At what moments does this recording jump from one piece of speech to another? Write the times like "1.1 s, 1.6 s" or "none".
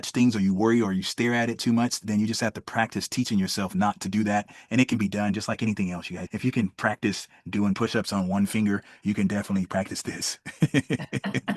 6.2 s